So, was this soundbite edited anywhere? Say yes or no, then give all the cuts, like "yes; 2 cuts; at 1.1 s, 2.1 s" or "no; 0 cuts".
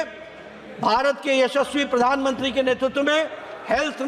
no; 0 cuts